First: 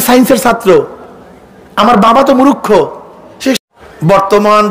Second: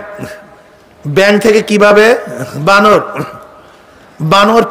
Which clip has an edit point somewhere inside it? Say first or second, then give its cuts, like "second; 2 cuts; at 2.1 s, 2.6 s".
first; 1 cut; at 3.6 s